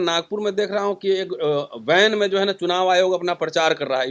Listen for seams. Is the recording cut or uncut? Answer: uncut